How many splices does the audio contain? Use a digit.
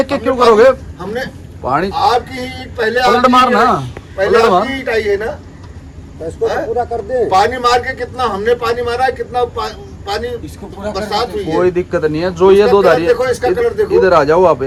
0